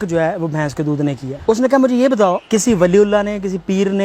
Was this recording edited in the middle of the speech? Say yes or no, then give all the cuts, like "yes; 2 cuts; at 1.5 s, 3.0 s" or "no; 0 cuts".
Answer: yes; 2 cuts; at 1.3 s, 2.4 s